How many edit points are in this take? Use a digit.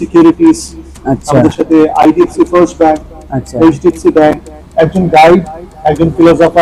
1